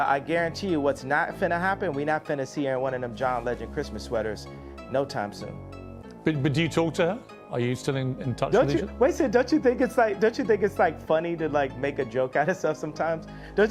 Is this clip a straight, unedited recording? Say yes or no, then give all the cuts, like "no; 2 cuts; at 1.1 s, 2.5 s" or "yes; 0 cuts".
yes; 0 cuts